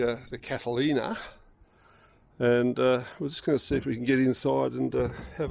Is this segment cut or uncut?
uncut